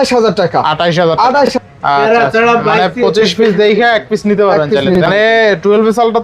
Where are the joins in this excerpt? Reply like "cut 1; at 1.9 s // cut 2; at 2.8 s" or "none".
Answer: cut 1; at 1.5 s // cut 2; at 5.0 s